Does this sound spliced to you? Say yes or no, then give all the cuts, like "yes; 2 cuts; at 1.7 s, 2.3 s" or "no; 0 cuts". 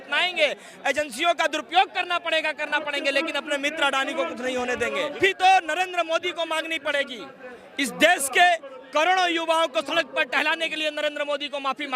yes; 1 cut; at 5.2 s